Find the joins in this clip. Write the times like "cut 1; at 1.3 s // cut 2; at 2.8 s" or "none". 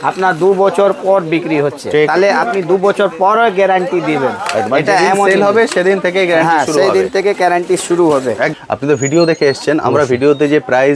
cut 1; at 8.5 s

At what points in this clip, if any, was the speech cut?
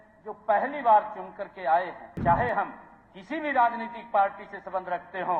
cut 1; at 2.0 s

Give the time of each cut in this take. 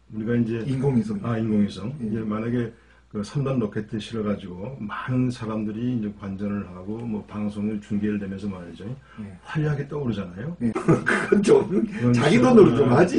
cut 1; at 10.8 s

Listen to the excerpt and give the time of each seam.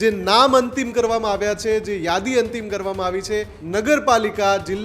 cut 1; at 3.6 s

